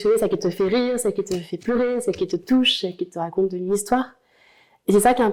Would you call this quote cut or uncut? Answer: uncut